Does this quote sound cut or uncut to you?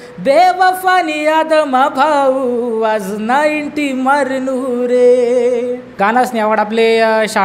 cut